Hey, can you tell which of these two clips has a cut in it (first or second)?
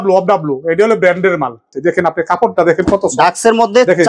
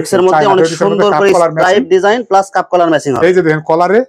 first